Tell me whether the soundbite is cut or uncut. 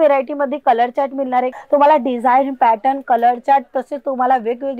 cut